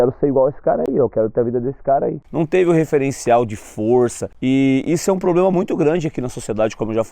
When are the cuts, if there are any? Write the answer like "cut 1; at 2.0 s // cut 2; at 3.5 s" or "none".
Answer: cut 1; at 2.2 s // cut 2; at 4.3 s